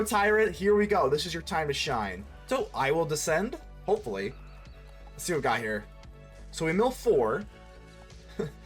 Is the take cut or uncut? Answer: cut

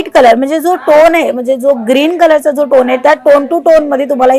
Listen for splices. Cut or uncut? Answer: uncut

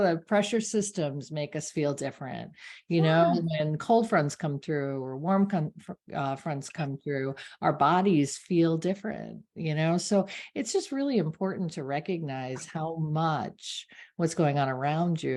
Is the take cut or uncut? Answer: uncut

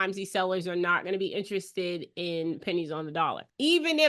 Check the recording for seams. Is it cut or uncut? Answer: uncut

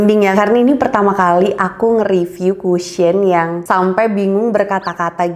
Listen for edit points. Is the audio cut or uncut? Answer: uncut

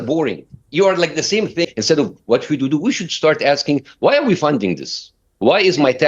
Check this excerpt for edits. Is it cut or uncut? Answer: cut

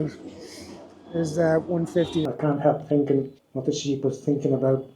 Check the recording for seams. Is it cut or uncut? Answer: cut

